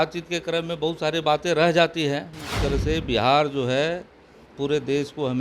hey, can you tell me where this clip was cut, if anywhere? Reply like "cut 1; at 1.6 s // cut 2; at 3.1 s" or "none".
cut 1; at 2.6 s